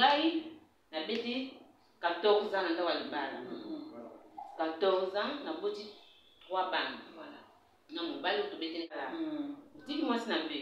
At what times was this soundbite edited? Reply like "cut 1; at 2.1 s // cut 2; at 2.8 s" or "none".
cut 1; at 8.9 s